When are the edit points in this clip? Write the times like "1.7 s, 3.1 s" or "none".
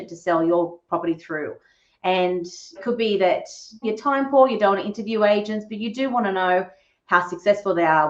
2.8 s, 3.8 s